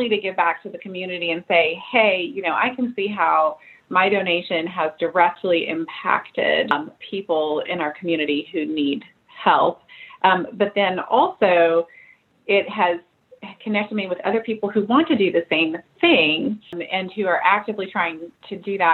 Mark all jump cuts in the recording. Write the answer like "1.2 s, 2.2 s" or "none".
6.7 s